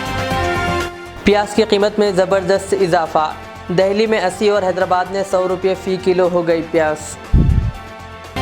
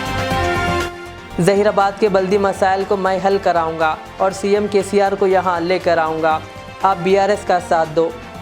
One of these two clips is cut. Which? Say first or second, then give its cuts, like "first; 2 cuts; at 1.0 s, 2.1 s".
second; 1 cut; at 1.0 s